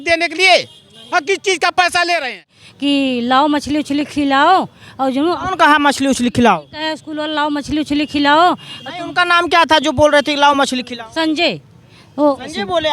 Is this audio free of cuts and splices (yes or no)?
no